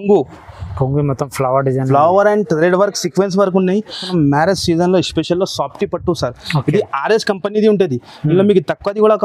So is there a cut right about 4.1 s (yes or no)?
yes